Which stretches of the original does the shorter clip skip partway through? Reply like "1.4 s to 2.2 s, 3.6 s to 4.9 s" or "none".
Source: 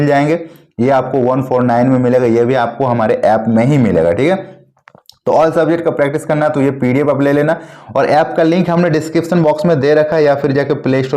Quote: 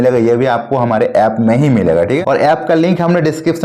4.3 s to 7.9 s